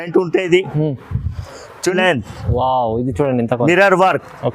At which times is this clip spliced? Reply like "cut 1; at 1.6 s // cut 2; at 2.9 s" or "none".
cut 1; at 2.0 s